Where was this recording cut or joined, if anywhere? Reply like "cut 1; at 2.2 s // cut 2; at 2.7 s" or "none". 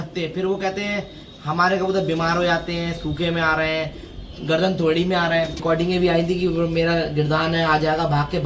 cut 1; at 5.6 s